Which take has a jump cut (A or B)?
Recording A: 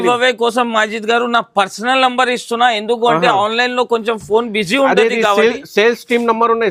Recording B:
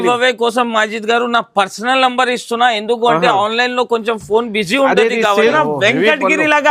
B